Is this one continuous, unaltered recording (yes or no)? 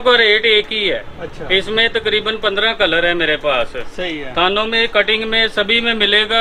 yes